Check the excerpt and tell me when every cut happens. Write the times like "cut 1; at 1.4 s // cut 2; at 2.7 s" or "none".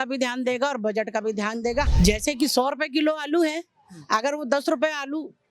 cut 1; at 1.9 s